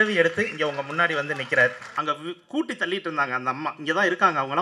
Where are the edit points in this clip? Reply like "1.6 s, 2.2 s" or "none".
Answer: 1.9 s